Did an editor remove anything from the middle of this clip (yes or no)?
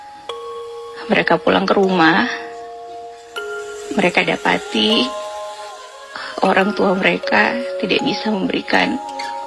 yes